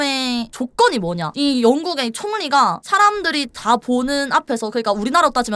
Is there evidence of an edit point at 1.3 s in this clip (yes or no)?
yes